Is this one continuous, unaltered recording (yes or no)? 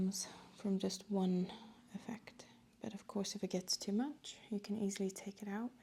yes